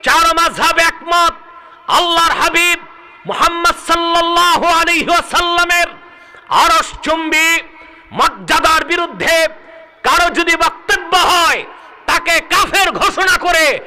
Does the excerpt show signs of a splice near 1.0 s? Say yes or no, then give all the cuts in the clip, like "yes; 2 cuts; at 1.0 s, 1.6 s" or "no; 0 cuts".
no; 0 cuts